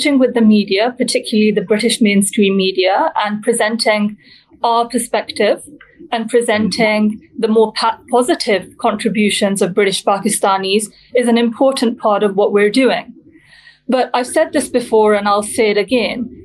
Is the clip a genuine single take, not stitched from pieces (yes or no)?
yes